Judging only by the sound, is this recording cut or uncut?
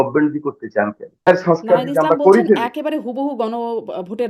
cut